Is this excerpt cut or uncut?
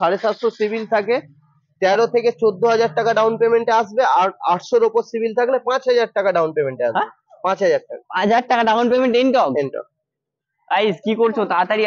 uncut